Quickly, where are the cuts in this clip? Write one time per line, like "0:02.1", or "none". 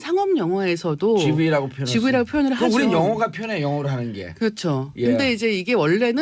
0:03.0